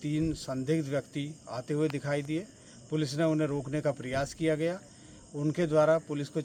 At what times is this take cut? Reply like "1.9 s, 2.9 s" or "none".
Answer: none